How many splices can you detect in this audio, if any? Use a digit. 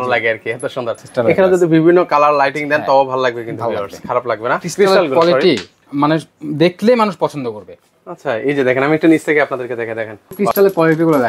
3